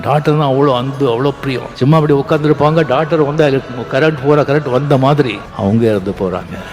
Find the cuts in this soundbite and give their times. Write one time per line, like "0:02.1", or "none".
0:01.7
0:05.5